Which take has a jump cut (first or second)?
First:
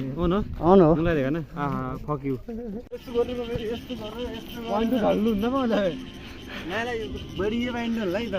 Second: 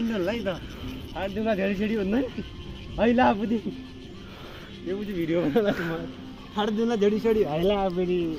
first